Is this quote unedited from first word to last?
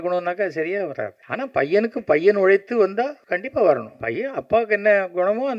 no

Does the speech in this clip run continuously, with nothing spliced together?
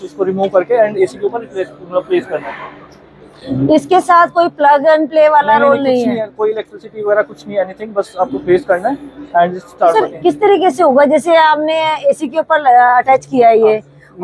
yes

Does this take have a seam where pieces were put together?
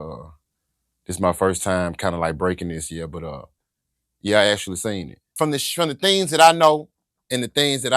yes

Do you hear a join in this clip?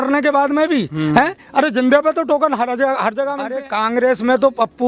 yes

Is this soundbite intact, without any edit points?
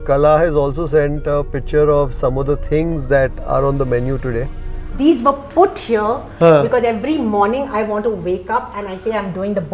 no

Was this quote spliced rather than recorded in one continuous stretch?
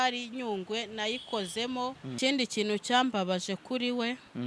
yes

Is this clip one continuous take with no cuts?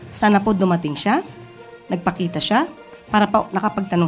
yes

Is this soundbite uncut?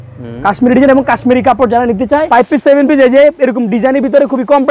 no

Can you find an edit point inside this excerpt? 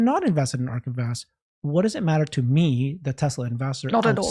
no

